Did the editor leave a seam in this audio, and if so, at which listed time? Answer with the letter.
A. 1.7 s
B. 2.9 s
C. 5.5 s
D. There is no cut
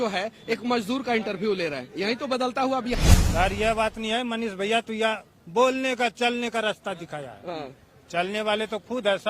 B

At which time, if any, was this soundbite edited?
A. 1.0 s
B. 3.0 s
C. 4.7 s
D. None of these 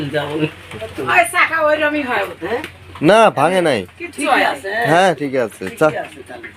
A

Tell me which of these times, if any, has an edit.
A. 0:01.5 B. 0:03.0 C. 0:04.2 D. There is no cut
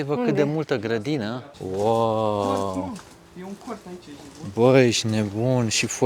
A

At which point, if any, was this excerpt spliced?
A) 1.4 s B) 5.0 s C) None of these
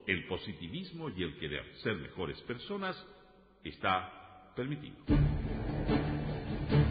B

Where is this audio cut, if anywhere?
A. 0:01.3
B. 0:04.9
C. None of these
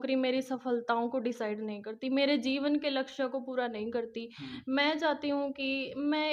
C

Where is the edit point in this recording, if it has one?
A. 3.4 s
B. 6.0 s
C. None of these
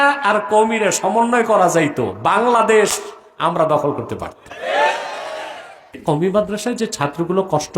B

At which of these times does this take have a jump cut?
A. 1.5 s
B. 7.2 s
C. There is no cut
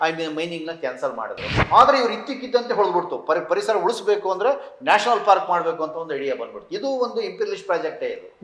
A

